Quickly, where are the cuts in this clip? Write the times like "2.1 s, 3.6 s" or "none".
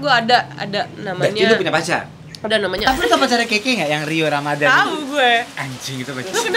2.9 s